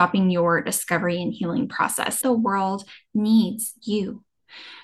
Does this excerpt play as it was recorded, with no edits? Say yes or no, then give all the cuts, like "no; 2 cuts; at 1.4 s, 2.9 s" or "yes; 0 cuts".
no; 1 cut; at 2.2 s